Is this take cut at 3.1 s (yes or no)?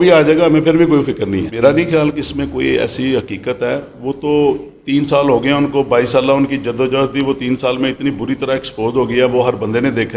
no